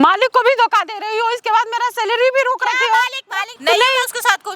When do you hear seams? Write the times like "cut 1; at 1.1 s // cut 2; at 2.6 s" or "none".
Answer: cut 1; at 3.5 s